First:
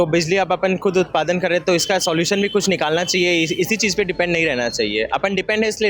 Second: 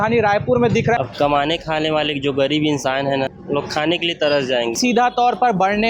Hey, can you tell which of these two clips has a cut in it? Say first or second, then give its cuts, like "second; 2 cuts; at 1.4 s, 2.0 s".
second; 3 cuts; at 1.0 s, 3.4 s, 4.8 s